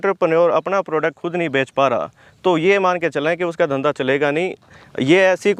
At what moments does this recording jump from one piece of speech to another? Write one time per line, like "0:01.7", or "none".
none